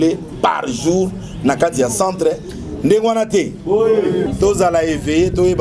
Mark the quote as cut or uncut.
cut